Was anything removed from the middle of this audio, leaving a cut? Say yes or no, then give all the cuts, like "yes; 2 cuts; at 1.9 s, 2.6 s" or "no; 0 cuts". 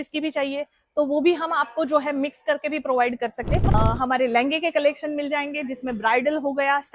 yes; 1 cut; at 3.7 s